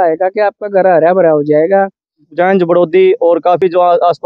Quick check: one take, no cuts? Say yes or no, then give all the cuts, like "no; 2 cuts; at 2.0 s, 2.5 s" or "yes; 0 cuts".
no; 1 cut; at 2.2 s